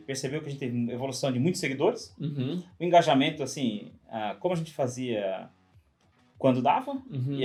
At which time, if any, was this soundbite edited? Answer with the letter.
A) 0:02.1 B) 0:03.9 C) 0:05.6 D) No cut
D